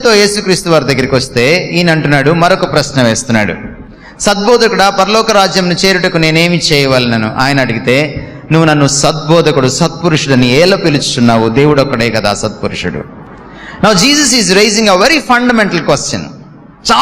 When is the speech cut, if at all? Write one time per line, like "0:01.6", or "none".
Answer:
none